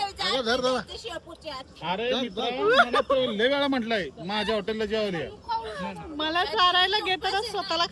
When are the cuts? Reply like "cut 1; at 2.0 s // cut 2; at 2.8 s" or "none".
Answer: cut 1; at 3.0 s